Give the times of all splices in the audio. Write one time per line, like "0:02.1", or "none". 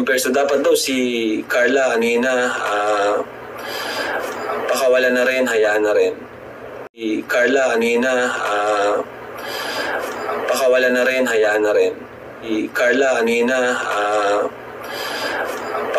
0:07.0
0:12.5

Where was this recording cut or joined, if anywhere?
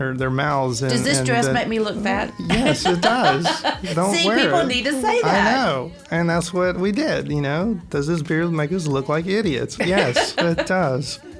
none

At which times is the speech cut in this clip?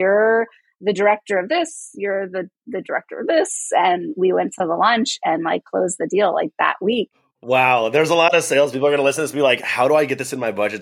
0:07.5

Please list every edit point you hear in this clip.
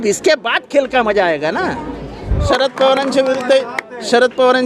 0:02.4

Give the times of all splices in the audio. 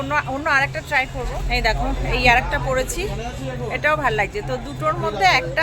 0:01.4

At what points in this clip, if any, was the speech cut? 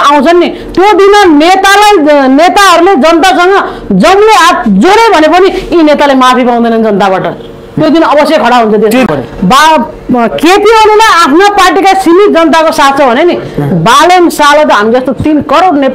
0:09.1

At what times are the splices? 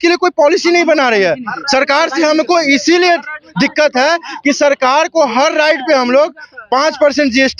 none

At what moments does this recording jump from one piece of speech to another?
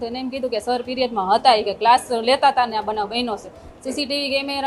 none

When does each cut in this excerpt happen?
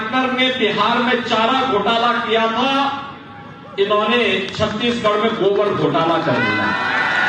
none

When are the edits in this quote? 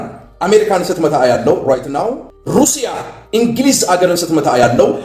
0:02.3

